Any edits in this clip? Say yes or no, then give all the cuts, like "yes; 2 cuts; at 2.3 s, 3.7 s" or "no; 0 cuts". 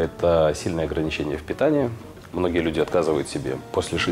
no; 0 cuts